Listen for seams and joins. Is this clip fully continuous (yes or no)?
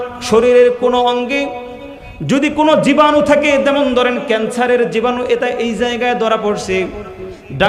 yes